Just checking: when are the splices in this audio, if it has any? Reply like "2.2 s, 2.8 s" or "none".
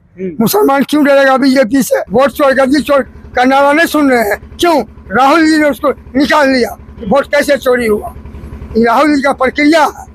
2.1 s

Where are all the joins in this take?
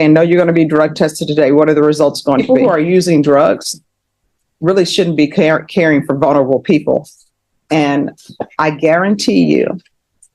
2.5 s

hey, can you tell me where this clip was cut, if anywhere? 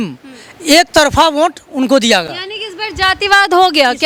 none

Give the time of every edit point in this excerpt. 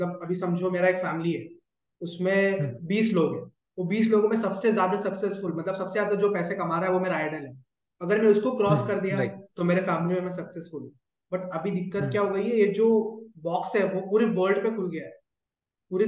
none

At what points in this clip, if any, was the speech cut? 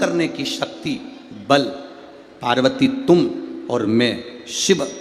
none

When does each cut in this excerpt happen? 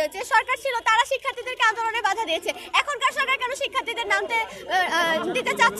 none

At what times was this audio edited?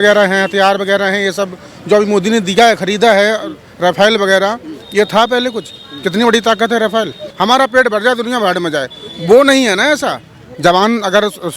7.2 s, 10.4 s

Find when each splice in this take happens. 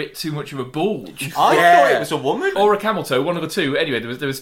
2.5 s

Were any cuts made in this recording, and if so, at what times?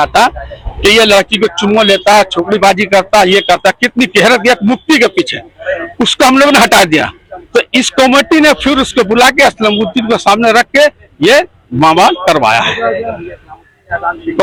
none

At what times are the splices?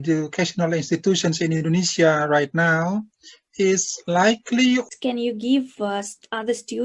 4.8 s

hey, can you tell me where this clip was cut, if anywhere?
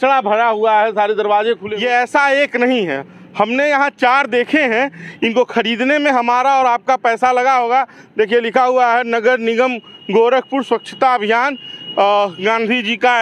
1.6 s

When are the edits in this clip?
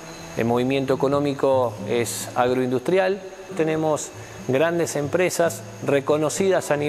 3.5 s

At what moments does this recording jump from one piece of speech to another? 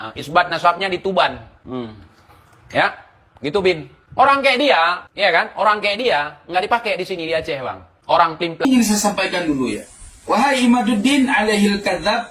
8.6 s

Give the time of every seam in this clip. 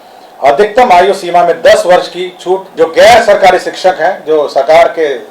2.7 s

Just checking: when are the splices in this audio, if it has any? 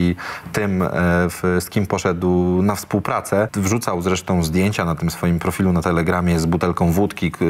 3.5 s

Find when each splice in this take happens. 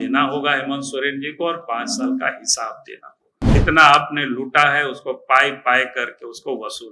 3.5 s

